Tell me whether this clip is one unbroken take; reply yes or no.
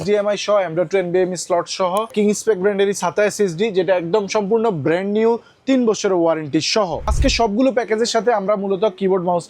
no